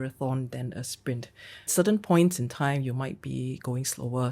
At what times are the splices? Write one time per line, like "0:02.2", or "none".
0:01.7

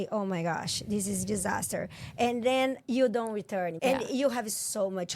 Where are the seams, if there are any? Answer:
0:03.7

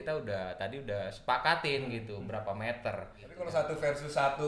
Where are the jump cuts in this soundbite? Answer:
0:03.2

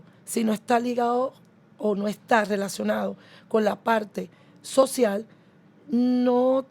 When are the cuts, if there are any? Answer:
none

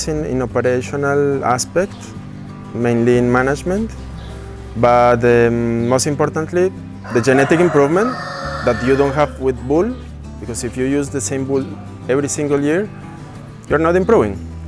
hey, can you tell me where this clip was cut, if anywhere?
none

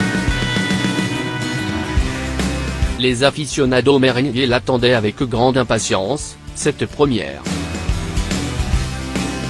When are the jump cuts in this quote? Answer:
0:02.9
0:07.4

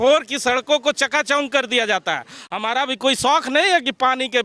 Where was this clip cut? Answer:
0:02.3

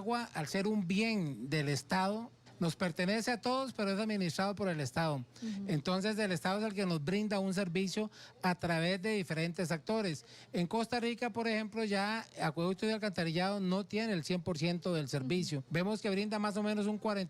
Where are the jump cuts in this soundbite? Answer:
0:02.4
0:15.6

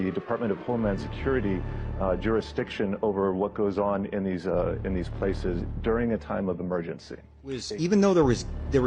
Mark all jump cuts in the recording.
0:07.7

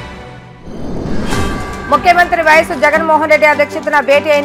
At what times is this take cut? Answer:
0:01.6

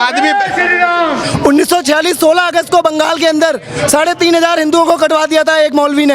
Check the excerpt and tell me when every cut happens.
0:01.2

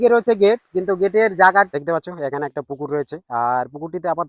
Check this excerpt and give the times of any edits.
0:01.8

